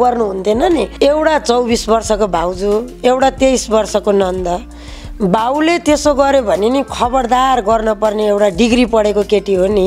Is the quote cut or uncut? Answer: cut